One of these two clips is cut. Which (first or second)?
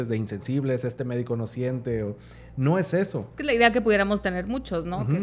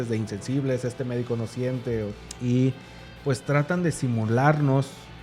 second